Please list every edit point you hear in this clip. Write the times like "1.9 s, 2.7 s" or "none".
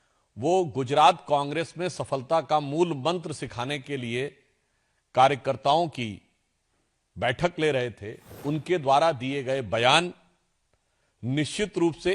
8.3 s